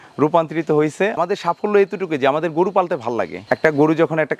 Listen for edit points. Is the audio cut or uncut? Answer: cut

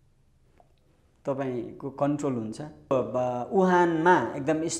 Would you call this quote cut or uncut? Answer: cut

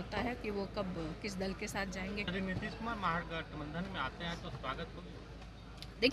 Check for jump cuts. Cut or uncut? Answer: cut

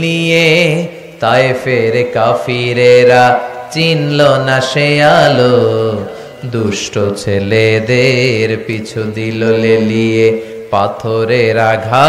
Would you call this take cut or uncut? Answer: uncut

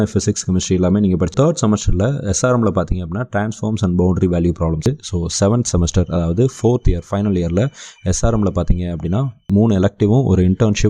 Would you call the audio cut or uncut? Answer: cut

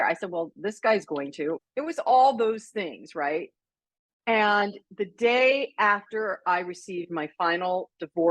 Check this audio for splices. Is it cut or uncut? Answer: cut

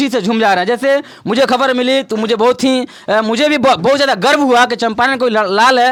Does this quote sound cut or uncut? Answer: uncut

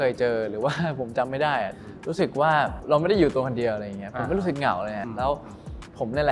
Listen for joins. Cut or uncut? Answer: cut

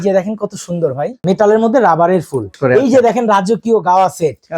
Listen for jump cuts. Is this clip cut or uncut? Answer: cut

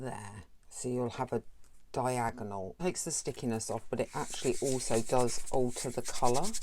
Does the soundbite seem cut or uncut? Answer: cut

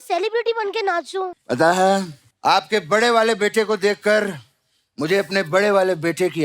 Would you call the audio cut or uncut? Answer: cut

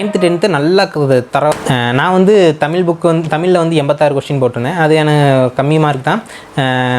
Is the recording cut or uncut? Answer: cut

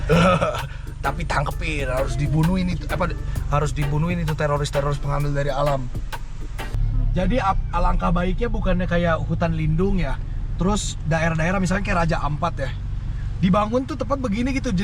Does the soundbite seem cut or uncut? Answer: cut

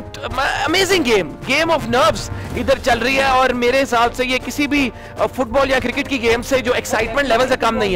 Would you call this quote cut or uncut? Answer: uncut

